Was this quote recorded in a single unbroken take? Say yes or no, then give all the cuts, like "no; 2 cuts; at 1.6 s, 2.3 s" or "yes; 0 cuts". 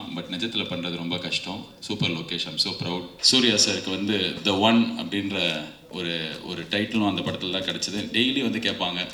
no; 1 cut; at 3.2 s